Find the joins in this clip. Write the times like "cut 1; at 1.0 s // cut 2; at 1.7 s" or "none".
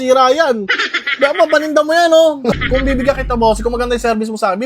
cut 1; at 2.6 s